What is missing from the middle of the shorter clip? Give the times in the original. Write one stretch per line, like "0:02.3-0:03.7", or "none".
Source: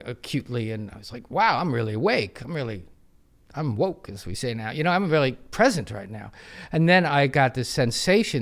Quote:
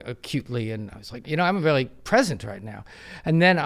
0:01.2-0:04.7